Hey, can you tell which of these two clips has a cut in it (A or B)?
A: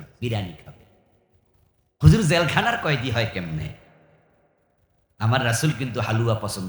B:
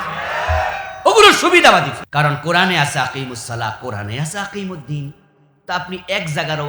B